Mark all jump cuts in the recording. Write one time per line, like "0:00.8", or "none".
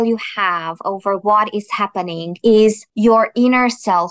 0:02.9